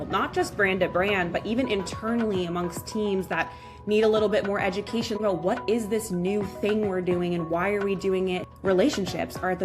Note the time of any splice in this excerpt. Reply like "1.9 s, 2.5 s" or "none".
5.2 s, 8.5 s